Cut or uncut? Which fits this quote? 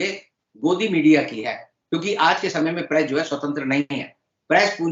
uncut